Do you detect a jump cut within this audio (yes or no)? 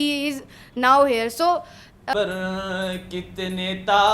yes